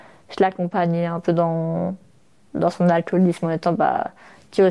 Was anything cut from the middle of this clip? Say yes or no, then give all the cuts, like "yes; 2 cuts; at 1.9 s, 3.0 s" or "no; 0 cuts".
no; 0 cuts